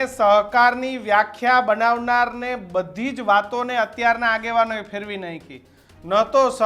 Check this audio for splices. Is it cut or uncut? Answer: uncut